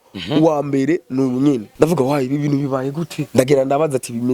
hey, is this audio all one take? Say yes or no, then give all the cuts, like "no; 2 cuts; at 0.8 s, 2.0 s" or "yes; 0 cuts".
no; 2 cuts; at 1.7 s, 3.2 s